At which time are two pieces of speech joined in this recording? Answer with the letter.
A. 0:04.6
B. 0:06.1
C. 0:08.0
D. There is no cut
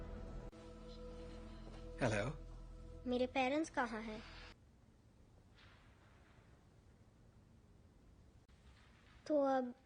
A